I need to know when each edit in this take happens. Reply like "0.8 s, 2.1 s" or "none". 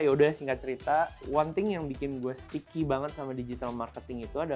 1.2 s, 2.5 s